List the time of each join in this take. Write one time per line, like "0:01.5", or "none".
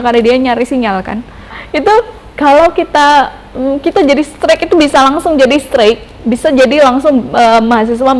0:01.6